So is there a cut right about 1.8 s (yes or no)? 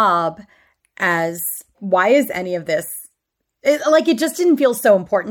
yes